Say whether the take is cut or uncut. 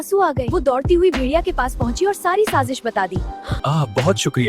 cut